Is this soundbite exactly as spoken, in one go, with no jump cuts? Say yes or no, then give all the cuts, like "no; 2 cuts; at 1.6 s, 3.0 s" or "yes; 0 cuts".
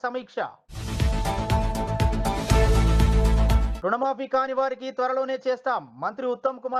yes; 0 cuts